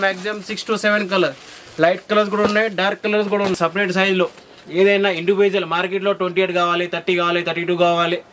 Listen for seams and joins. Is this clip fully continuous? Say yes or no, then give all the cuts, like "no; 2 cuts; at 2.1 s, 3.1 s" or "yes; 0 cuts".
no; 1 cut; at 3.5 s